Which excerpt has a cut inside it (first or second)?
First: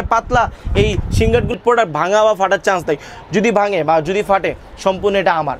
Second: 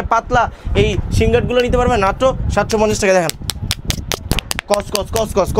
first